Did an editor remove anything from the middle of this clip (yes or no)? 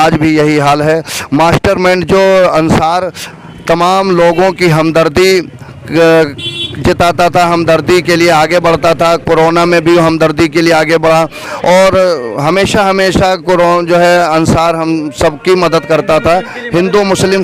no